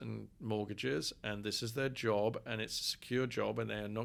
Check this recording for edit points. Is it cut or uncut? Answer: uncut